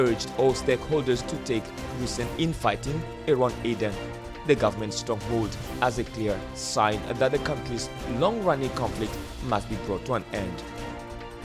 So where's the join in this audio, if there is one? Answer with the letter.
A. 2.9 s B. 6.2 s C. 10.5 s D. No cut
C